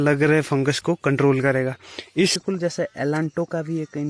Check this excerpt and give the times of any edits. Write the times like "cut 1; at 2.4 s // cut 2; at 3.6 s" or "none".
cut 1; at 2.4 s